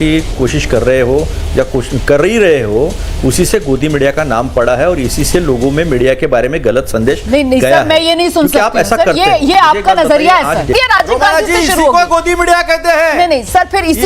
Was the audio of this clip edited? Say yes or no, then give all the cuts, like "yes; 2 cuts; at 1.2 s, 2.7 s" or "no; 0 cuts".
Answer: yes; 1 cut; at 10.8 s